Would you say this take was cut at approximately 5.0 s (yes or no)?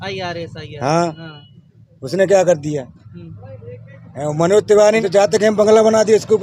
yes